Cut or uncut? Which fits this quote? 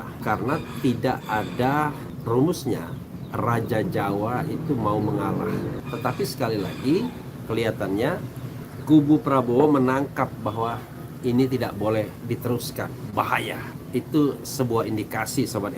cut